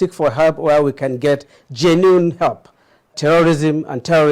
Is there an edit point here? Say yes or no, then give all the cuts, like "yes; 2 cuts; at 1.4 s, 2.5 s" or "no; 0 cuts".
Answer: yes; 1 cut; at 3.1 s